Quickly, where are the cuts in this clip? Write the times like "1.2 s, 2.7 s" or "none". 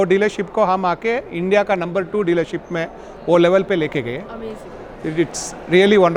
none